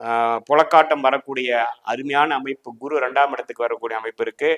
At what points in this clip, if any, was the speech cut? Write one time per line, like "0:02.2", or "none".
none